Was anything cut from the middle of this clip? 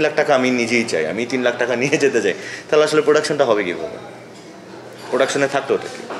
no; 0 cuts

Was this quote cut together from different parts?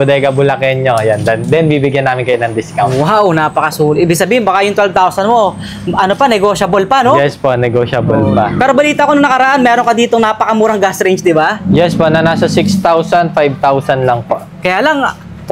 no; 0 cuts

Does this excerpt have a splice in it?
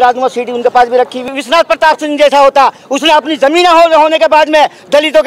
yes; 1 cut; at 1.2 s

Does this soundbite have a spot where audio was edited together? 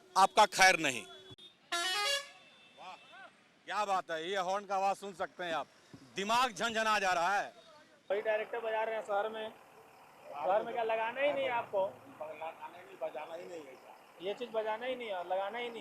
yes; 2 cuts; at 1.2 s, 8.1 s

